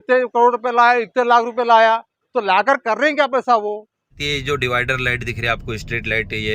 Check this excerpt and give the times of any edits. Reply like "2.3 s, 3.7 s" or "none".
4.2 s